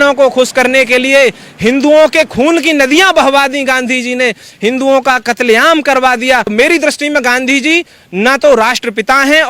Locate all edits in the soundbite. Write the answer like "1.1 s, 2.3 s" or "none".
6.5 s